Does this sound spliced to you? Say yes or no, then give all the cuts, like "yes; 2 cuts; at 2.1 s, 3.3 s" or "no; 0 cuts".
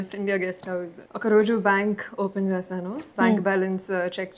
yes; 1 cut; at 1.0 s